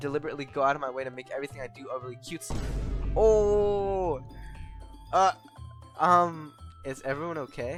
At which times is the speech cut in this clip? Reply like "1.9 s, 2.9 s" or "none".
none